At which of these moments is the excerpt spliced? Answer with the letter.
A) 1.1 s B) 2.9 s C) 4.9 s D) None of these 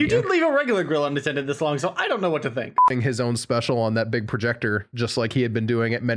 B